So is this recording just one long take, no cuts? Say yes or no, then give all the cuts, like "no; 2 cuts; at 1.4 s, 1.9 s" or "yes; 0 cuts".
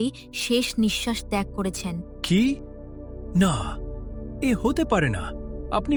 yes; 0 cuts